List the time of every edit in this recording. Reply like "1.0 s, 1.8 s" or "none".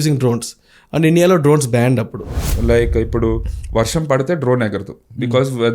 2.5 s